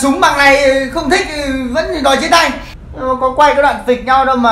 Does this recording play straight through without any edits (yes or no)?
no